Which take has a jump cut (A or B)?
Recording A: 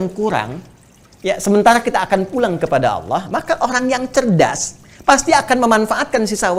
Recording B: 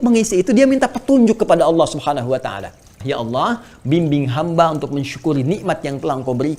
B